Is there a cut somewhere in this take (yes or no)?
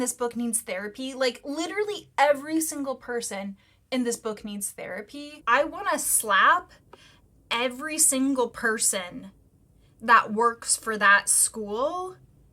yes